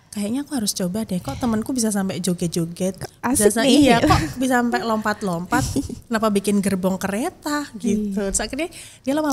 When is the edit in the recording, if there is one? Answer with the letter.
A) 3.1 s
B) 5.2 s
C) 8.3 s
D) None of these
D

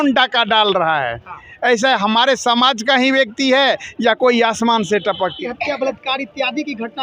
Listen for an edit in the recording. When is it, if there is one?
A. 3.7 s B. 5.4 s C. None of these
B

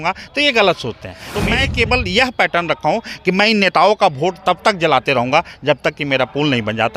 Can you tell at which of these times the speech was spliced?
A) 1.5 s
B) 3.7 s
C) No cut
A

